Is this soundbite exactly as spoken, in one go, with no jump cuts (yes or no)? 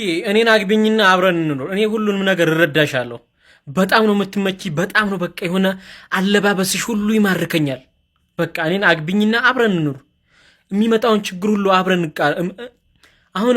yes